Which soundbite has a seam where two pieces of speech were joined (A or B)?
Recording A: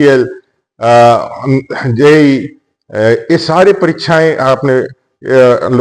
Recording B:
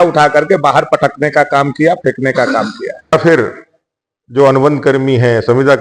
B